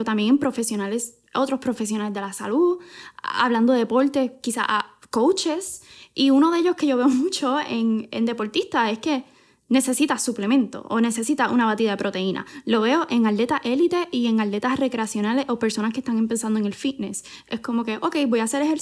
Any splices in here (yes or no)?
no